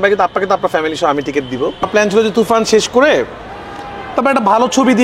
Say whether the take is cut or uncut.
cut